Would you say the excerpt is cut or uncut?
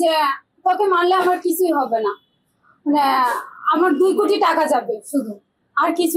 uncut